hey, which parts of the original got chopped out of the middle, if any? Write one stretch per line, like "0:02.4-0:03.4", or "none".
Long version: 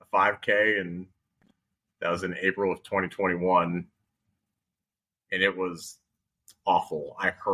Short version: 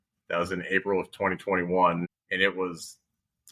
0:03.9-0:05.2

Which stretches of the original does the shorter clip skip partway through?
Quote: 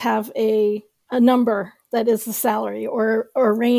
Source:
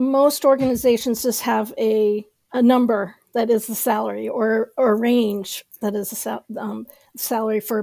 none

